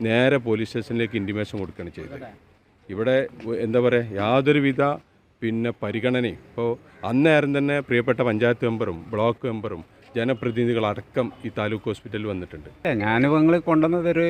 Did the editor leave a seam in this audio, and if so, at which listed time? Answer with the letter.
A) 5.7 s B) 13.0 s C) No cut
B